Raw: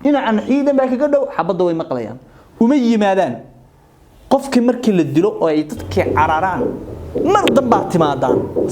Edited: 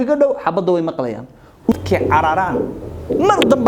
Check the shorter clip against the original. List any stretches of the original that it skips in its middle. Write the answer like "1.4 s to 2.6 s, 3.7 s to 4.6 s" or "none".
2.6 s to 5.8 s